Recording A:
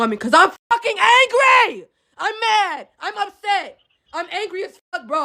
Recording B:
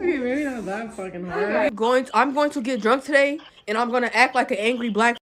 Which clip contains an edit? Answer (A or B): B